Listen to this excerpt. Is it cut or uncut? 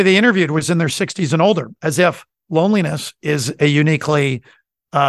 cut